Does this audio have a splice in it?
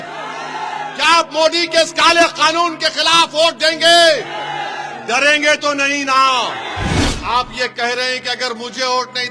yes; 1 cut; at 7.0 s

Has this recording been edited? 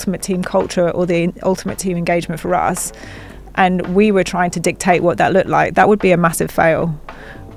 no; 0 cuts

